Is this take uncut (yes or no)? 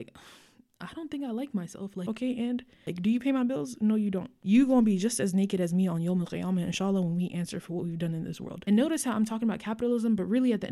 no